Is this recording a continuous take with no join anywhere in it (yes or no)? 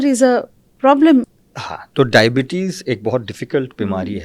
no